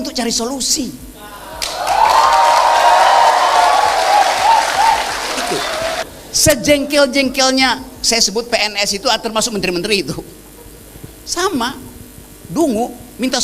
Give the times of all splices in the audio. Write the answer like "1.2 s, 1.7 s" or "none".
6.0 s